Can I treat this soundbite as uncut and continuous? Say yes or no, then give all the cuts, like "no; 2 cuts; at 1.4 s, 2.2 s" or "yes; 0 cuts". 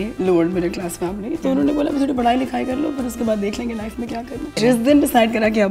no; 1 cut; at 4.5 s